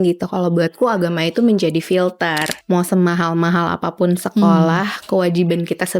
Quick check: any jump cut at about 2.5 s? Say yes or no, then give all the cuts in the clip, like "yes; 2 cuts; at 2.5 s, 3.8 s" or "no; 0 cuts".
yes; 1 cut; at 2.5 s